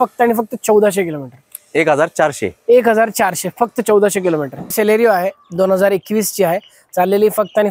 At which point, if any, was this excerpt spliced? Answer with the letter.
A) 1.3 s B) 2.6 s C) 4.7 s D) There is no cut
C